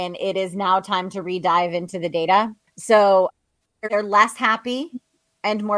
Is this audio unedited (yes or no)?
no